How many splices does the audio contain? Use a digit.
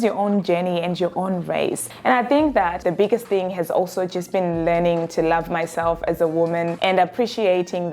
2